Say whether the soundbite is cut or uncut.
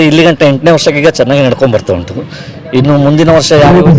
uncut